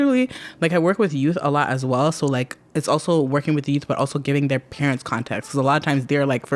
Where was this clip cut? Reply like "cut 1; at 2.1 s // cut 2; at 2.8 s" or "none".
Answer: none